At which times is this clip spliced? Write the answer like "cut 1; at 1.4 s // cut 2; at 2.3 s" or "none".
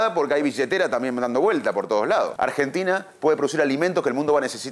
cut 1; at 2.3 s